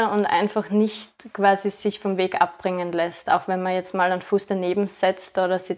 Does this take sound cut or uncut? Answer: uncut